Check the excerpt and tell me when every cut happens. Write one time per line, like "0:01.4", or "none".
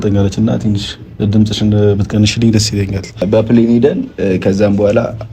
0:03.2